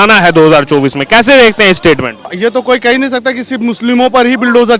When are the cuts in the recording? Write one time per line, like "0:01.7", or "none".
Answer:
0:02.3